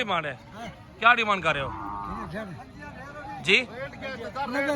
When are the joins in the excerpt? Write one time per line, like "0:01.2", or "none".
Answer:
none